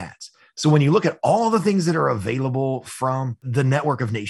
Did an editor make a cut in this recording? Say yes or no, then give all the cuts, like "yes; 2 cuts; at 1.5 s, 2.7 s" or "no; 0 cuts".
yes; 1 cut; at 3.4 s